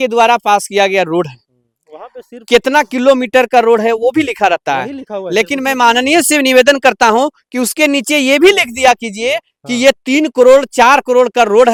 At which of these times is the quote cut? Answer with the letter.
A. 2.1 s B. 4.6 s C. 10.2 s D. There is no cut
D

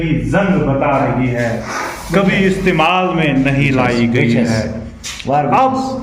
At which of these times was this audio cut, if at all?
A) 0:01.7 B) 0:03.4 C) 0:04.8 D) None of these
A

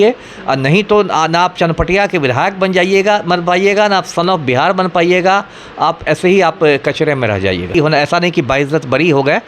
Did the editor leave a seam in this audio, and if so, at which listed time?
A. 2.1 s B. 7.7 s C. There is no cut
B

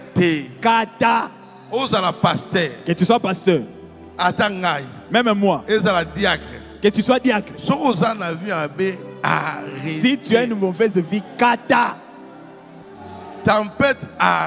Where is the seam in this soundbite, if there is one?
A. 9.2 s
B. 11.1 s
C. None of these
C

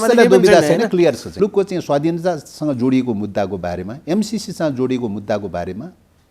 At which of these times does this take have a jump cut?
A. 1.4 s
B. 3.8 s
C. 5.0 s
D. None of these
A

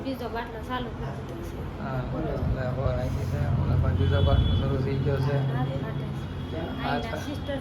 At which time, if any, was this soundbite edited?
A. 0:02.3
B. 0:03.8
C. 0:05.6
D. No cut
D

